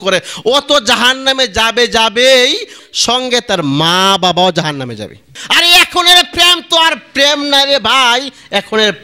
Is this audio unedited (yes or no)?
no